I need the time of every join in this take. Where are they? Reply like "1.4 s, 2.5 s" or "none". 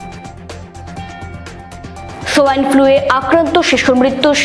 0.9 s